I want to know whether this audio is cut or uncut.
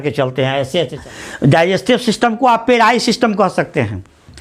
cut